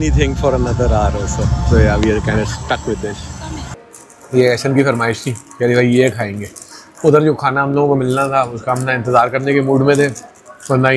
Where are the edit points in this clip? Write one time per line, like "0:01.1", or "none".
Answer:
0:03.8